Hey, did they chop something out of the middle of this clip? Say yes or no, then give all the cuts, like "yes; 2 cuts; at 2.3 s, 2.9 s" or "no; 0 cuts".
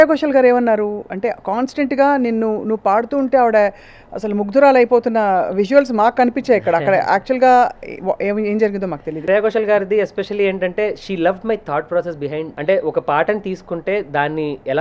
yes; 2 cuts; at 9.2 s, 12.5 s